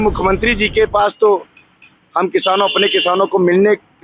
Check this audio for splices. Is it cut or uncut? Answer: uncut